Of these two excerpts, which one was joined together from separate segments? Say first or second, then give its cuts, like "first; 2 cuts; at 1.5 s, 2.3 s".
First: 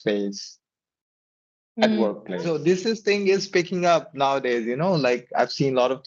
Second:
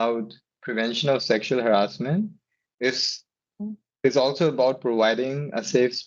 first; 1 cut; at 2.5 s